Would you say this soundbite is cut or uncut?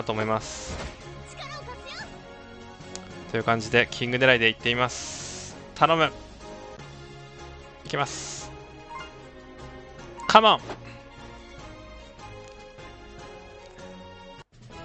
uncut